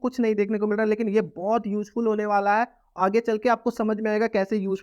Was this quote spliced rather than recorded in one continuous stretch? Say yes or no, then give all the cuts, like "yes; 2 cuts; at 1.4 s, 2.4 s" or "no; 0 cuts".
no; 0 cuts